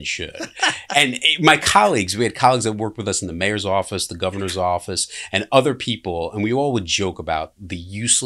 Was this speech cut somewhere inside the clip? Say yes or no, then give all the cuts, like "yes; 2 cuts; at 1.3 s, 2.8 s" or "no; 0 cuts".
no; 0 cuts